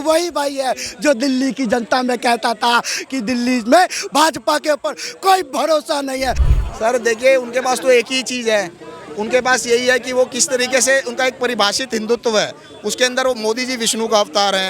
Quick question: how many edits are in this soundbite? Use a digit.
1